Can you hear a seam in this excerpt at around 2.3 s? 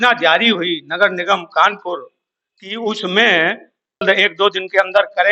no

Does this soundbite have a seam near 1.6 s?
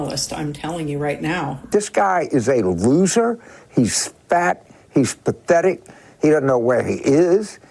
yes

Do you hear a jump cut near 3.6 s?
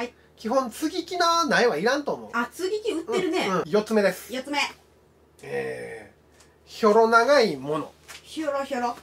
yes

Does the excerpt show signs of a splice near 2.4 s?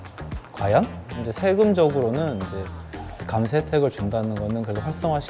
no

